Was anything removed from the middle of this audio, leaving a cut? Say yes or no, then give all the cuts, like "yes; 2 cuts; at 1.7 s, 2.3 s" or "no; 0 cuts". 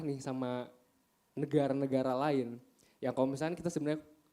no; 0 cuts